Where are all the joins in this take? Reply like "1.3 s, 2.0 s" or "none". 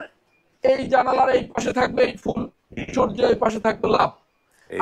none